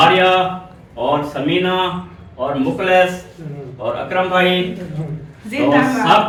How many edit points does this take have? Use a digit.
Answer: 0